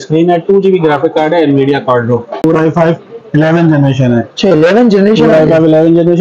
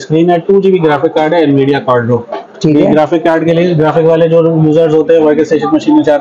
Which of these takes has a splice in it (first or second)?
first